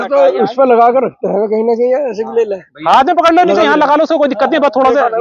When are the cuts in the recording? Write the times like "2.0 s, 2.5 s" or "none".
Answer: none

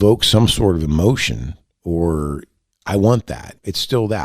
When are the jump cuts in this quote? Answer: none

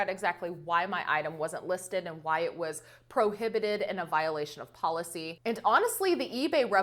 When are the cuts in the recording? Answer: none

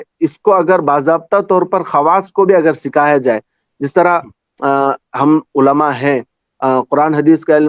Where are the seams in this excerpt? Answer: none

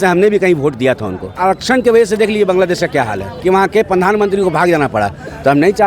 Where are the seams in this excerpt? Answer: 1.4 s, 3.3 s

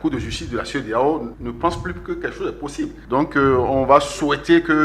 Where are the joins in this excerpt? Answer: 1.3 s, 2.9 s

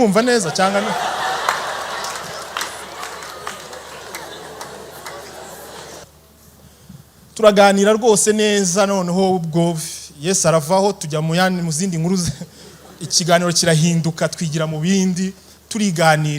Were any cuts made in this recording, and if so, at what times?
6.0 s

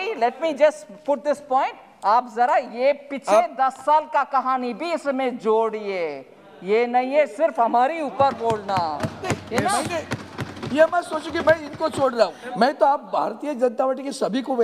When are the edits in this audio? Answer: 12.4 s

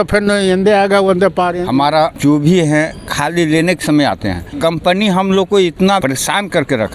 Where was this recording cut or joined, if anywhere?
1.6 s, 4.5 s, 6.0 s

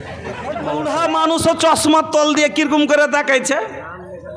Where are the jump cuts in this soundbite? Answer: 0.9 s

